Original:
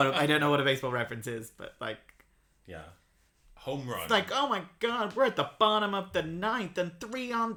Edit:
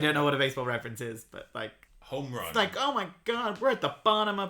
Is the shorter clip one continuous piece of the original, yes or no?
no